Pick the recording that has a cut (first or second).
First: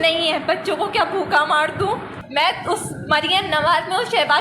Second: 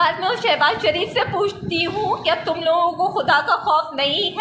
first